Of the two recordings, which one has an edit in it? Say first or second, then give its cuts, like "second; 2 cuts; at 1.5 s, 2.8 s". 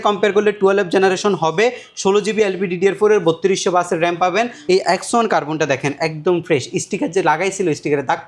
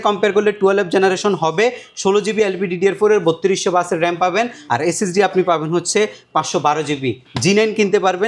first; 1 cut; at 4.6 s